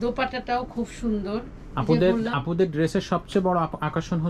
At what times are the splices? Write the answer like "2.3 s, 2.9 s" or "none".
none